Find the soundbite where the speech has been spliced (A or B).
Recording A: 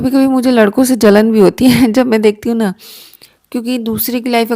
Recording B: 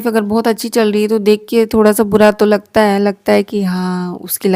A